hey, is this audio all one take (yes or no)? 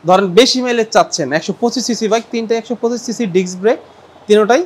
yes